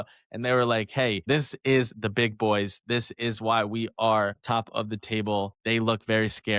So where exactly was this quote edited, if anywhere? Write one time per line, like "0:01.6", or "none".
0:01.2
0:05.5